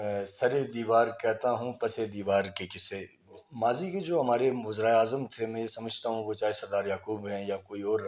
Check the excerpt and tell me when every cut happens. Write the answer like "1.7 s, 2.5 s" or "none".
3.4 s